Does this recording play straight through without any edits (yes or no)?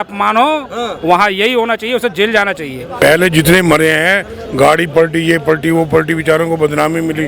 no